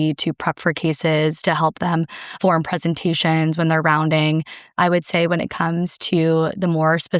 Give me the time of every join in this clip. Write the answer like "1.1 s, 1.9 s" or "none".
2.3 s, 4.7 s

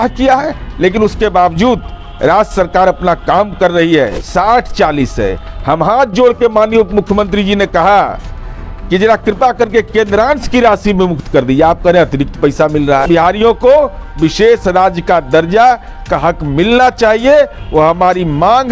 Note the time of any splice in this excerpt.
4.2 s, 13.0 s

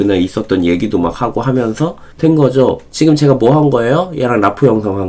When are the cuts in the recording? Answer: none

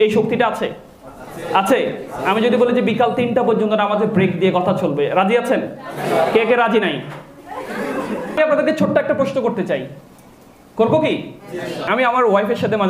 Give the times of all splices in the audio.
8.4 s, 11.9 s

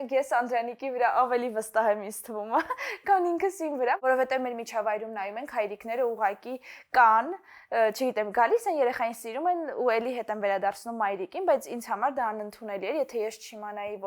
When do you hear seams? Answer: 4.0 s

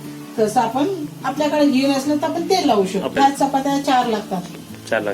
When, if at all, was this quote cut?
3.1 s

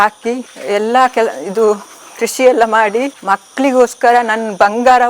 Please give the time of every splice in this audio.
3.2 s

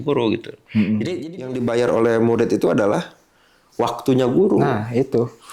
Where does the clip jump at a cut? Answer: 1.1 s

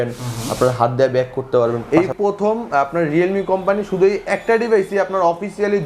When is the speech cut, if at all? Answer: 1.8 s

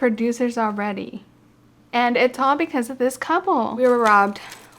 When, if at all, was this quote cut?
3.7 s

